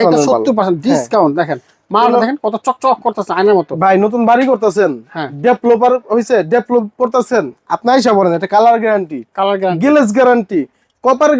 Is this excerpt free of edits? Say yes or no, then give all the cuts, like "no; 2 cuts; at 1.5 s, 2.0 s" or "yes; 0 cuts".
yes; 0 cuts